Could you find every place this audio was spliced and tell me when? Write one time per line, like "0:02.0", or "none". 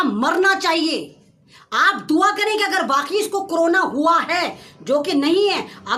none